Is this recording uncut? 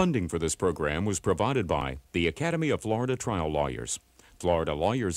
no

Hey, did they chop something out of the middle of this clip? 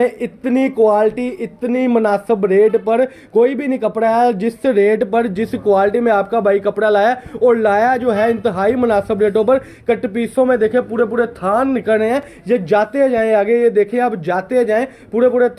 no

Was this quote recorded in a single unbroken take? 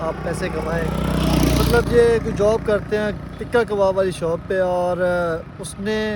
yes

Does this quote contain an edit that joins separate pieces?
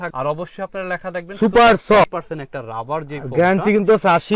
no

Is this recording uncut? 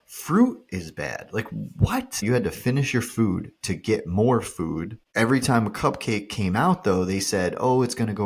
no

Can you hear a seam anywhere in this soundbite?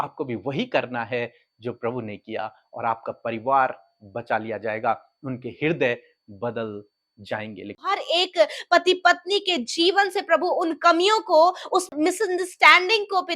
yes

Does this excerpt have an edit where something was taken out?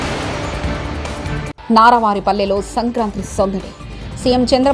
no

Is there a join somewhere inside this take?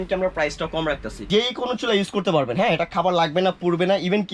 yes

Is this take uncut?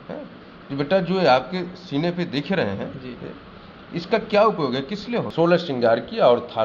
no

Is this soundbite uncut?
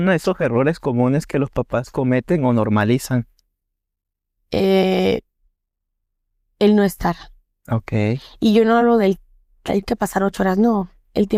yes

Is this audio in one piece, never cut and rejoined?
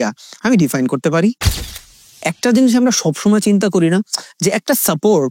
no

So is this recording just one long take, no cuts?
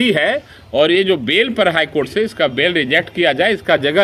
yes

